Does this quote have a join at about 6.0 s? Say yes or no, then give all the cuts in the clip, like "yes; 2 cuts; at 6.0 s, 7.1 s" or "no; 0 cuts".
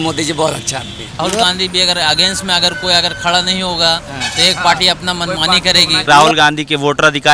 yes; 2 cuts; at 1.2 s, 6.0 s